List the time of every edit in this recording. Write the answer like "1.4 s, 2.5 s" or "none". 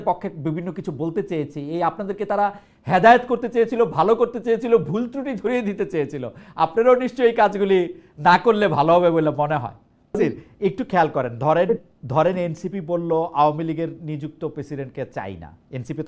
10.2 s